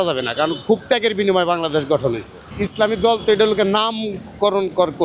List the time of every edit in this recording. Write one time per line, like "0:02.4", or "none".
0:02.4